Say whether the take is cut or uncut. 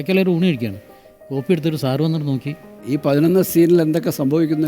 cut